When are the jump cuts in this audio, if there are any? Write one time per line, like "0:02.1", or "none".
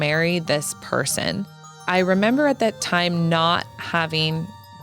0:01.7